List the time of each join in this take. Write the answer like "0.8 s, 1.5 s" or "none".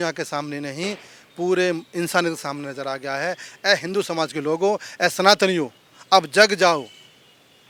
none